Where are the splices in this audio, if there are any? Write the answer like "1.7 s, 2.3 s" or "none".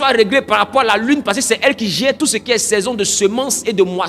none